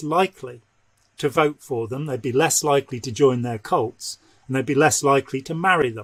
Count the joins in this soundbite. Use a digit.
0